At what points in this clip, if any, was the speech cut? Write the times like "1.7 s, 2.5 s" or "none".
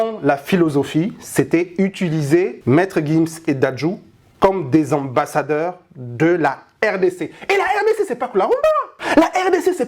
2.6 s, 8.9 s